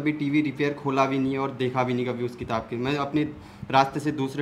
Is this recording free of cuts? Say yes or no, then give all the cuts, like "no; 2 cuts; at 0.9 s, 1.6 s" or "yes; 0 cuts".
yes; 0 cuts